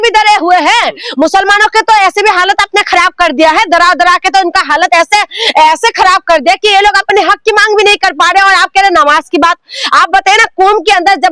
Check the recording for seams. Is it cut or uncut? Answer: uncut